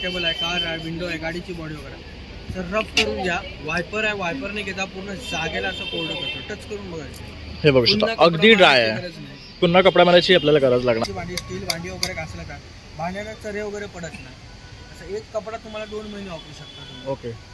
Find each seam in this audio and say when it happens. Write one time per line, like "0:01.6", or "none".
0:11.0